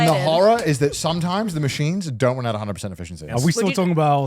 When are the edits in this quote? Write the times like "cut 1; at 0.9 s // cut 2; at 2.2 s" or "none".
cut 1; at 3.3 s

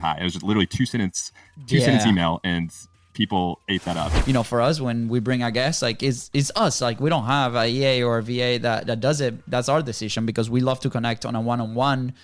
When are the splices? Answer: cut 1; at 4.1 s

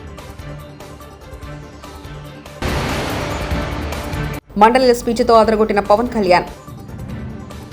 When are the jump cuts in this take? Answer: none

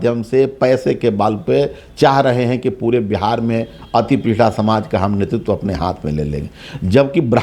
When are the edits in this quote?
none

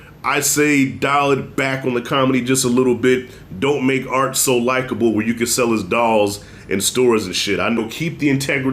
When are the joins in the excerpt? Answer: cut 1; at 7.8 s

